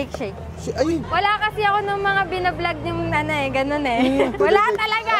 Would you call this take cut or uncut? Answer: cut